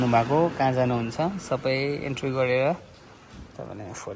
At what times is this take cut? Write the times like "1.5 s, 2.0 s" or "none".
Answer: none